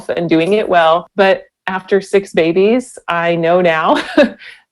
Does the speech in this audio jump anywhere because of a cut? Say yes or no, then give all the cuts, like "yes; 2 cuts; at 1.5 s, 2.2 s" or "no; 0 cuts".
yes; 1 cut; at 1.1 s